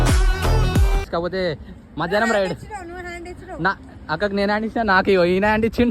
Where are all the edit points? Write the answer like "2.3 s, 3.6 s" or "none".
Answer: 1.1 s